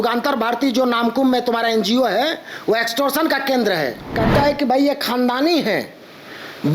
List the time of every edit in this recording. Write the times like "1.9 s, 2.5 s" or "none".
4.0 s